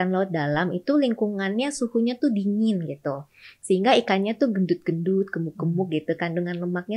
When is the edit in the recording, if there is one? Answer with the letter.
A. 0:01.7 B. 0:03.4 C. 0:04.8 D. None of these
D